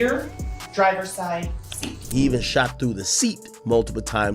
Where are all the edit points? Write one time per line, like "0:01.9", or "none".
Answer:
0:02.1